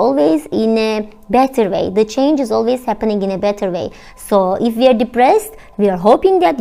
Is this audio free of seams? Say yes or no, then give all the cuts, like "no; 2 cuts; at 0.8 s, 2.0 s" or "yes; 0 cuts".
yes; 0 cuts